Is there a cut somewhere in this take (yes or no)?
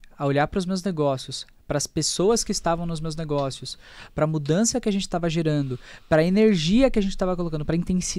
no